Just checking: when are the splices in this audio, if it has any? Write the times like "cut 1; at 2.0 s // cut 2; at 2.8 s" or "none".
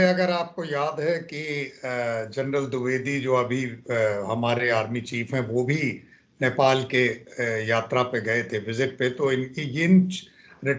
none